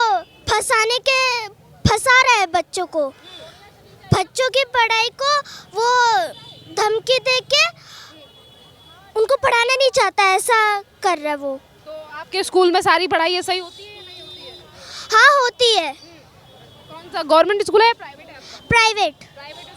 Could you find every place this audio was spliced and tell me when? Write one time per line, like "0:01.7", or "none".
none